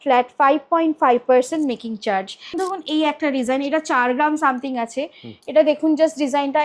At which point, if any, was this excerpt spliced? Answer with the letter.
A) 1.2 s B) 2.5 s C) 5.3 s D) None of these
B